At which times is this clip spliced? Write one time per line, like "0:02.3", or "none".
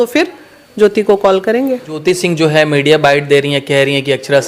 0:02.0

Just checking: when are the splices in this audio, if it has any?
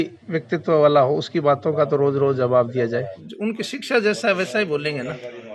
0:03.2

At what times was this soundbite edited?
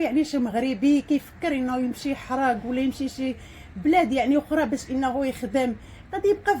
none

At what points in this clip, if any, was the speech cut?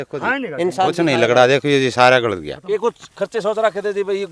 0:02.5

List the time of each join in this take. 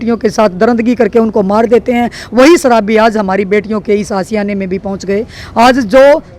none

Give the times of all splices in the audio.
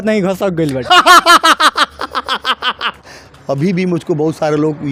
none

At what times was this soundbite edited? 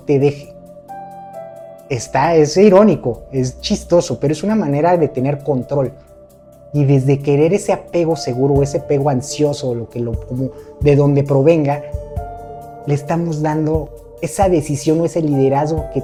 none

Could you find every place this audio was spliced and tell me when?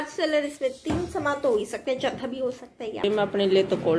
0:03.0

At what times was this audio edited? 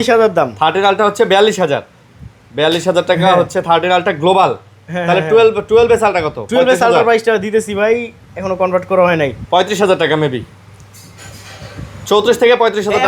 none

